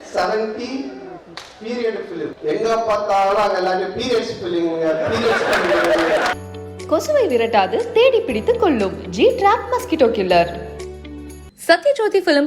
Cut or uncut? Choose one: cut